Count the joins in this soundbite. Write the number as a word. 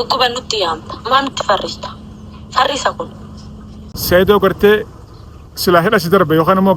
one